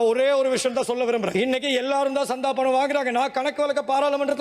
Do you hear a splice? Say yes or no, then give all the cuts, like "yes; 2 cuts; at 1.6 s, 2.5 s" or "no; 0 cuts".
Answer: no; 0 cuts